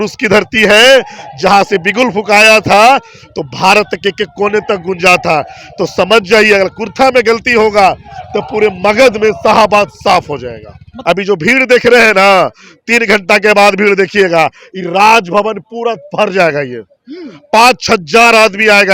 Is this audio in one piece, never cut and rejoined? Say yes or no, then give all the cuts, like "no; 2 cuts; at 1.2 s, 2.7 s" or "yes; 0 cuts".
no; 1 cut; at 10.9 s